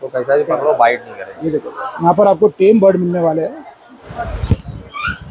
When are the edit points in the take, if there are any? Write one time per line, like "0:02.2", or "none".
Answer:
0:04.1